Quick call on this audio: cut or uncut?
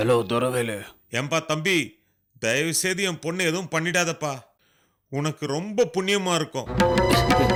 uncut